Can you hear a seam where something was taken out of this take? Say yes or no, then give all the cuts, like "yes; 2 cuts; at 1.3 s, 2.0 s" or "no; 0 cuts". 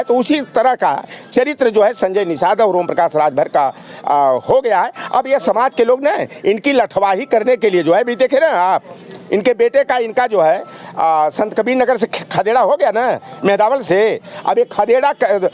no; 0 cuts